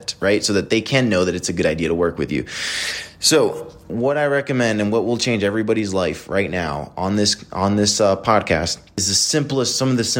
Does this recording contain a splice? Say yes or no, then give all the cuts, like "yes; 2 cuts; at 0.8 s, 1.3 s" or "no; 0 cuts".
yes; 2 cuts; at 3.8 s, 9.1 s